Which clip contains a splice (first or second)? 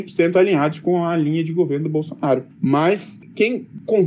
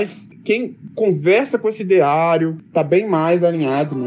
second